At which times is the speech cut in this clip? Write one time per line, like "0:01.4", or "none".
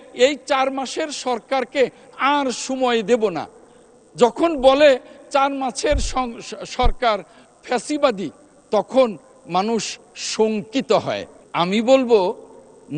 0:11.4